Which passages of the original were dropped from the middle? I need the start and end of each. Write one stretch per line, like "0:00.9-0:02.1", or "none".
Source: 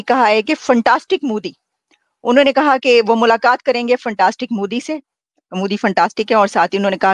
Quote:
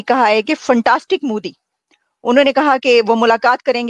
none